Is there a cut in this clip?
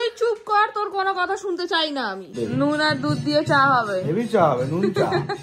yes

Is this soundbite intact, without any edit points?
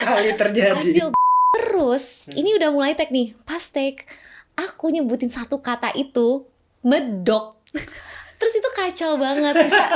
no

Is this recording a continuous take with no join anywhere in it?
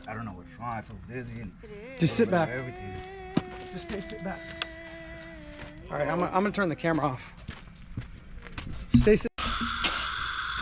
no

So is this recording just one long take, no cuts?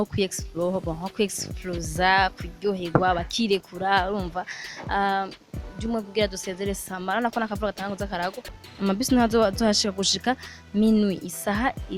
no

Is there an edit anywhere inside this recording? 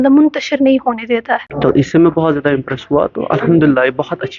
yes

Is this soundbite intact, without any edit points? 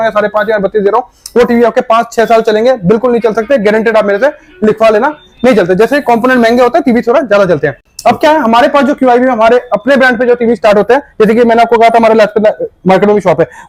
yes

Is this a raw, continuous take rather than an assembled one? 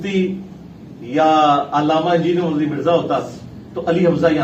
yes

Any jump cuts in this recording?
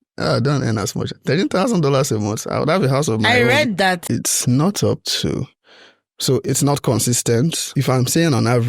yes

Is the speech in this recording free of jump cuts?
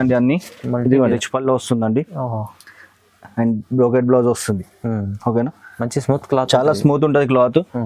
no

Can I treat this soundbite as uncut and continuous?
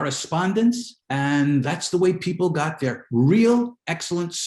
no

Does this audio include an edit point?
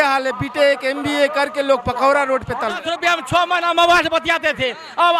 yes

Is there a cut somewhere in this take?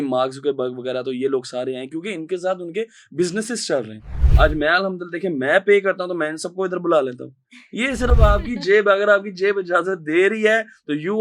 yes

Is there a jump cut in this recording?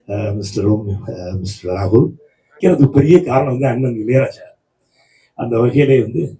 yes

